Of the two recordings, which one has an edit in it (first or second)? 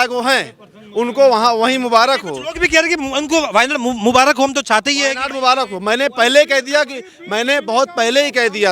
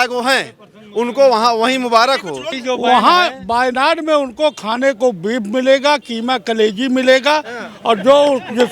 second